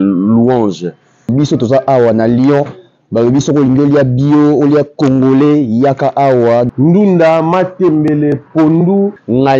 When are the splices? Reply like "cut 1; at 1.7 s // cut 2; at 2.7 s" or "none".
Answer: none